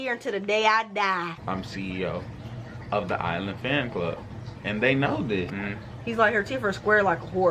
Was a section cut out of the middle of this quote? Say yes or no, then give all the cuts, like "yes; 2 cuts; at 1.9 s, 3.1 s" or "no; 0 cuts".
yes; 2 cuts; at 1.4 s, 5.5 s